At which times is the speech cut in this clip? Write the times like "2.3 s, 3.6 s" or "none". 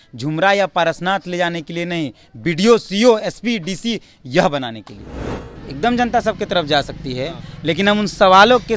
5.3 s